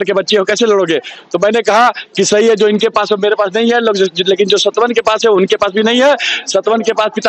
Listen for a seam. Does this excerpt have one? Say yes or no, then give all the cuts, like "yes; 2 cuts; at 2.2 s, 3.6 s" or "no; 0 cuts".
no; 0 cuts